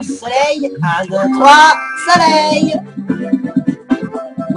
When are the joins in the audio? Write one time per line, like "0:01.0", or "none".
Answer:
0:01.9